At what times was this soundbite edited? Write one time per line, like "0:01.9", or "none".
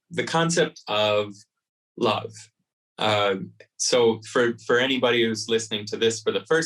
none